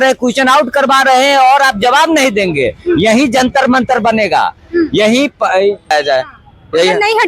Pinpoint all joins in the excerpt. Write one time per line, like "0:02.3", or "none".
0:05.9